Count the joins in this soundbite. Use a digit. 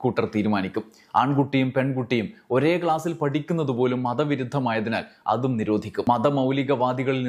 1